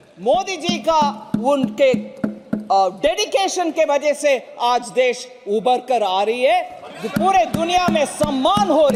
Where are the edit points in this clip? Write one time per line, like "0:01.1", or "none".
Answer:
none